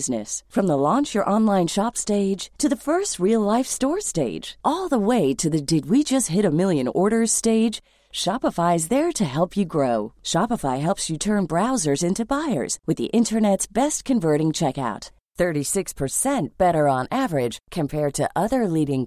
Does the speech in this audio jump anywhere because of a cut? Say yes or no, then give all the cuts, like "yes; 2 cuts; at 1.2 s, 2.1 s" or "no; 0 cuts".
no; 0 cuts